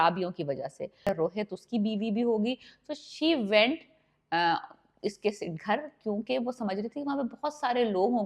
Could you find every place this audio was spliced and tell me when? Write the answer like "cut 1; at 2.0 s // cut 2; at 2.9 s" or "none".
cut 1; at 1.1 s

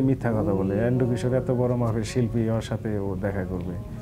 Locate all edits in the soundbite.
none

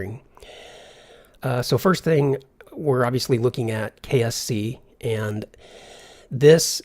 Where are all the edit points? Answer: cut 1; at 3.7 s

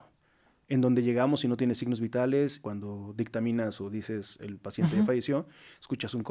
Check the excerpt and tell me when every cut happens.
cut 1; at 2.6 s

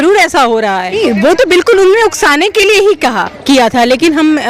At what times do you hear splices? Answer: cut 1; at 0.9 s

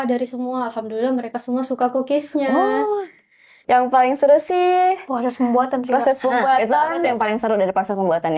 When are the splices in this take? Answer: cut 1; at 3.6 s

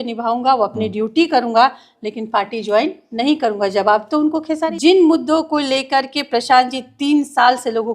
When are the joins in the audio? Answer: cut 1; at 4.7 s

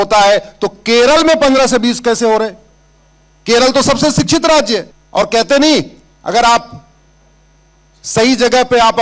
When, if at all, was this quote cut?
cut 1; at 5.0 s

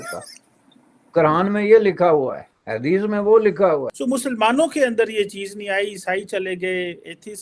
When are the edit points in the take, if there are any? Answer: cut 1; at 3.9 s

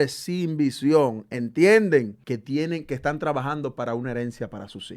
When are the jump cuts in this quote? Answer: cut 1; at 2.2 s

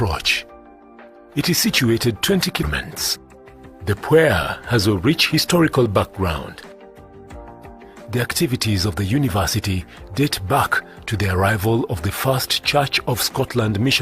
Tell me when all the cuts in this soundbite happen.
cut 1; at 2.6 s

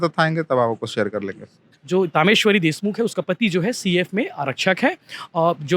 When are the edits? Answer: cut 1; at 1.7 s

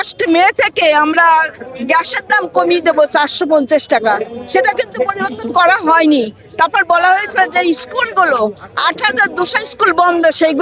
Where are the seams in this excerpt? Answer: none

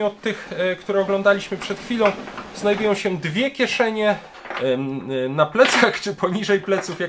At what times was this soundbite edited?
cut 1; at 4.3 s

